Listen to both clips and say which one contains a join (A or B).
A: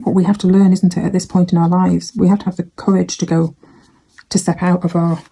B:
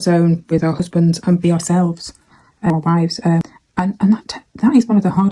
B